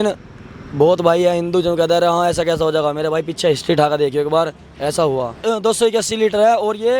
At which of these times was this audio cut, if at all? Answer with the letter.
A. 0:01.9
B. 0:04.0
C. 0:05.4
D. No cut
C